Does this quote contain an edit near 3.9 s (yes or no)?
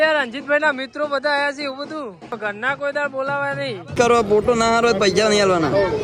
yes